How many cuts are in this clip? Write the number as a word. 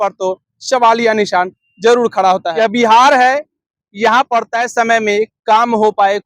one